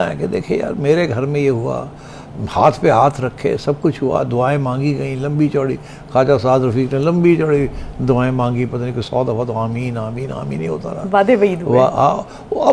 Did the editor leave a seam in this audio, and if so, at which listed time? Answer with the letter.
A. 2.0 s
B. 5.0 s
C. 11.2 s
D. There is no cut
D